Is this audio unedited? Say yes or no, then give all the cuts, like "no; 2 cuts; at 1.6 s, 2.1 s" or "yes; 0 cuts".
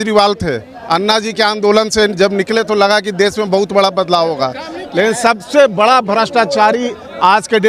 yes; 0 cuts